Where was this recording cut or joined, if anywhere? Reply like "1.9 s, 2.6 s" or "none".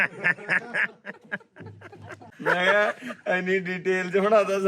2.3 s